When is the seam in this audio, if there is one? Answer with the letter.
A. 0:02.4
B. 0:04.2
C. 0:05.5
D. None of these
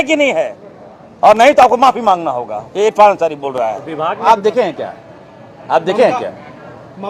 B